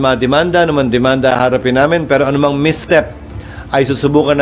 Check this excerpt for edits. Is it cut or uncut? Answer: uncut